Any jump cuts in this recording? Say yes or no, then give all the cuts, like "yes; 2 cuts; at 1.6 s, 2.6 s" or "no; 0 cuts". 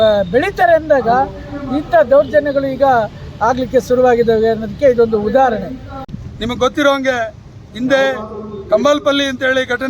yes; 1 cut; at 6.0 s